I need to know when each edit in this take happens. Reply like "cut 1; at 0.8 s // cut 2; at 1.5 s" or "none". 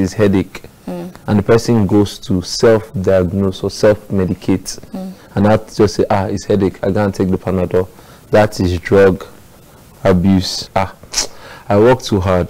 cut 1; at 10.6 s